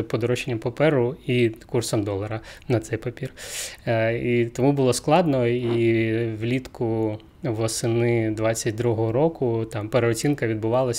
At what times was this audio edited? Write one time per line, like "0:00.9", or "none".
none